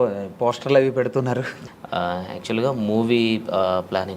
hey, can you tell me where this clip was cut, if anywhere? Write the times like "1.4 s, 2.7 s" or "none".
1.7 s